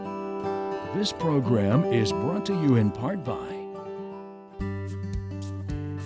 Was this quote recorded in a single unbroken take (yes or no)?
no